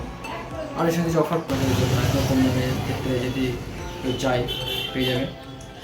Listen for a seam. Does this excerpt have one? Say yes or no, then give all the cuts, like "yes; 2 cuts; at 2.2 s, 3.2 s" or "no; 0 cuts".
yes; 1 cut; at 1.5 s